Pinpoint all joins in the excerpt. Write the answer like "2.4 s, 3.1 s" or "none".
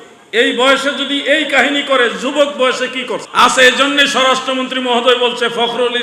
3.3 s